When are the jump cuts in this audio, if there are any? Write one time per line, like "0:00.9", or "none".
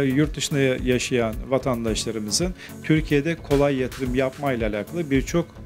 none